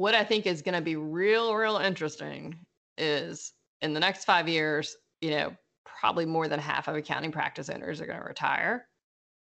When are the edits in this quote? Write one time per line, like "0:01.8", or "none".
none